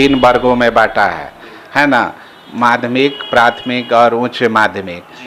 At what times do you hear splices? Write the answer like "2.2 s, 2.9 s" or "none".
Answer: none